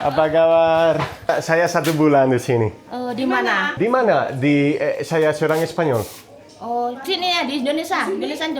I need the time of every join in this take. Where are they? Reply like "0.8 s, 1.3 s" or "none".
1.3 s